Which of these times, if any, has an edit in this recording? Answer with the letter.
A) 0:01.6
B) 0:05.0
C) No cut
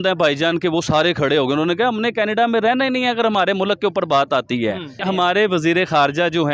B